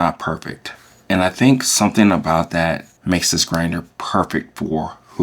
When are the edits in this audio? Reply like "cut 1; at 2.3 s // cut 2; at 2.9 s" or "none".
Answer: cut 1; at 2.9 s